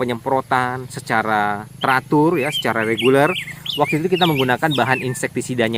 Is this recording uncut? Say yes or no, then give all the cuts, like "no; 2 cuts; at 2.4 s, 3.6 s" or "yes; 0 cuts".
yes; 0 cuts